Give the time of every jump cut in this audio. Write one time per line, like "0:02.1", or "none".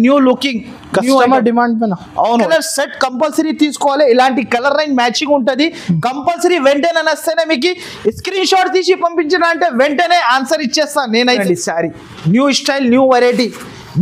0:02.5
0:11.4